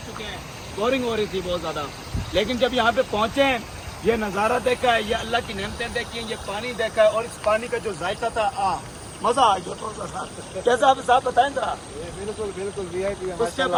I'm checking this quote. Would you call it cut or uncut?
uncut